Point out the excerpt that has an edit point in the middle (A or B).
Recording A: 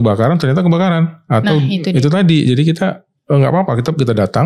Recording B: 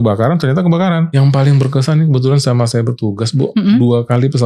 B